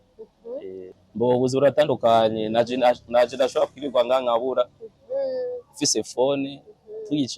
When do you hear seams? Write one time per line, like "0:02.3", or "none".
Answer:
0:01.0